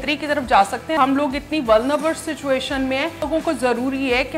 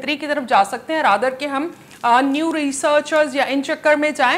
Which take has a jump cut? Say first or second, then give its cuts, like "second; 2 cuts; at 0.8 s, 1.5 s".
first; 2 cuts; at 1.0 s, 3.3 s